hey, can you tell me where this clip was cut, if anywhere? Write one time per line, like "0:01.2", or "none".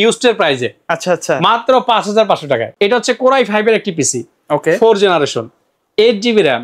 0:02.7